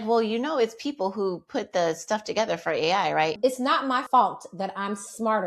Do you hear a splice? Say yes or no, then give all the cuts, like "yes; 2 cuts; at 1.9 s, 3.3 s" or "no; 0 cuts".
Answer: yes; 1 cut; at 3.8 s